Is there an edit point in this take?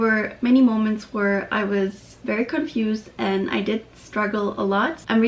no; 0 cuts

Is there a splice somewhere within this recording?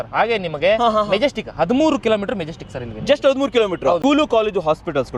yes; 1 cut; at 4.0 s

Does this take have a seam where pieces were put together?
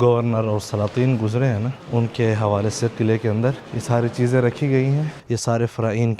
yes; 3 cuts; at 1.8 s, 3.7 s, 5.1 s

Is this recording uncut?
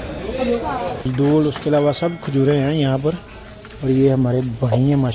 no; 1 cut; at 1.1 s

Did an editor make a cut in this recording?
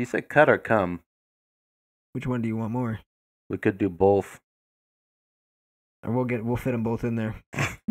no; 0 cuts

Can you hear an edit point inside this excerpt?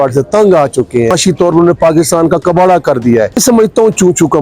yes; 2 cuts; at 1.1 s, 3.4 s

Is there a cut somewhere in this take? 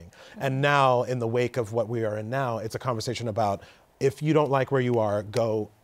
no; 0 cuts

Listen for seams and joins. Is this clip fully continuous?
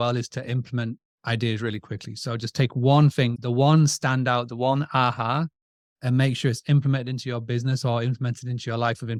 yes; 0 cuts

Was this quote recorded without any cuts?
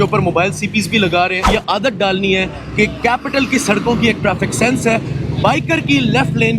no; 1 cut; at 1.5 s

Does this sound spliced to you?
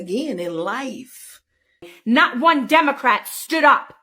yes; 1 cut; at 1.9 s

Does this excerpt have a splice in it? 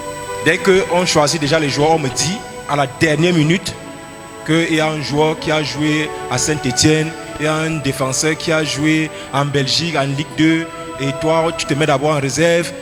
no; 0 cuts

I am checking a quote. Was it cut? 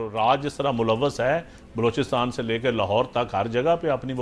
no; 0 cuts

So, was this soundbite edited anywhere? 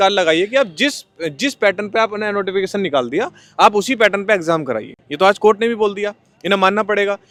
no; 0 cuts

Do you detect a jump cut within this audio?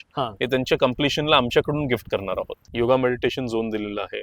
yes; 1 cut; at 2.7 s

